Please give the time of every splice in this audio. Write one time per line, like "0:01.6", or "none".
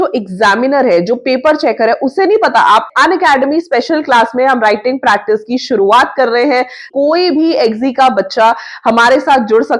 0:02.9
0:06.9